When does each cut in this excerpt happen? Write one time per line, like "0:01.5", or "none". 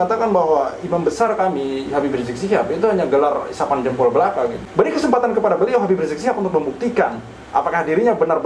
0:04.6